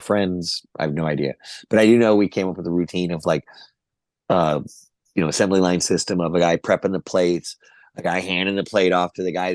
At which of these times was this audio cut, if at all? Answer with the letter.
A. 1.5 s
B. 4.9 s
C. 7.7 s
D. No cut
D